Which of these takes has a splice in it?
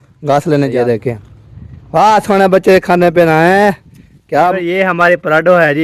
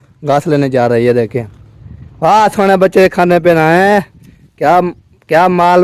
first; 2 cuts; at 0.9 s, 4.5 s

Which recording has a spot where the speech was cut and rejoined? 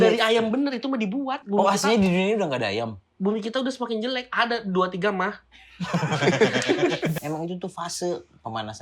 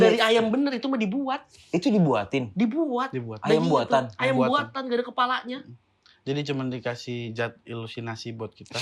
first; 2 cuts; at 1.4 s, 7.2 s

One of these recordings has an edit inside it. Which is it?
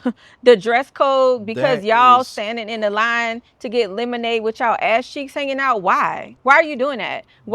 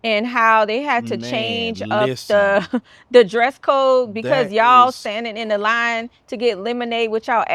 first; 1 cut; at 6.3 s

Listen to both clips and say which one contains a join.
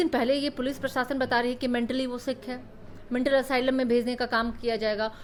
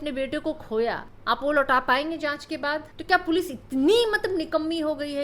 second; 2 cuts; at 1.1 s, 2.9 s

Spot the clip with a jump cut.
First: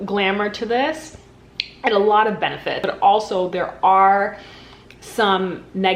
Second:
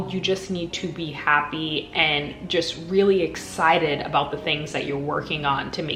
first; 1 cut; at 2.8 s

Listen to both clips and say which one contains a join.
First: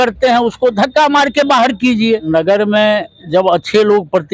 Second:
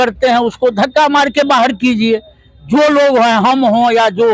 first; 1 cut; at 2.2 s

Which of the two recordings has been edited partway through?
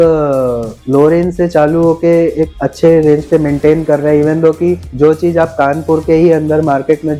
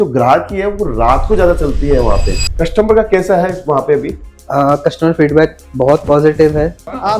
second; 1 cut; at 2.3 s

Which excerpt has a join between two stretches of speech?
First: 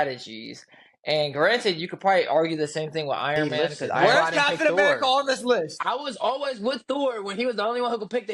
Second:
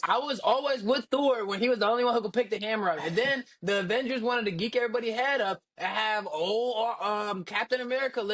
first; 1 cut; at 4.0 s

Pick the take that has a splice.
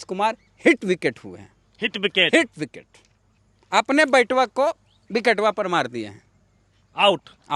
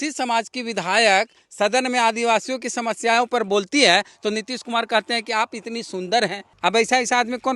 second; 1 cut; at 6.5 s

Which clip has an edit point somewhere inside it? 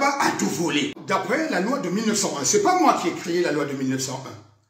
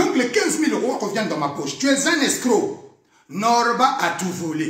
first; 1 cut; at 1.0 s

